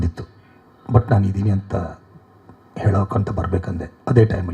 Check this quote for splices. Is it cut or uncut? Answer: uncut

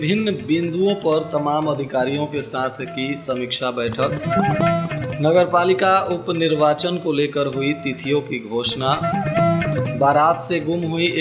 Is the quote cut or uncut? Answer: uncut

